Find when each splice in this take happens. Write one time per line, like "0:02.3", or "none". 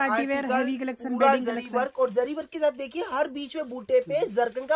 none